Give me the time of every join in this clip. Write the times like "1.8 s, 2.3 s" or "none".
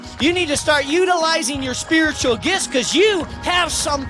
none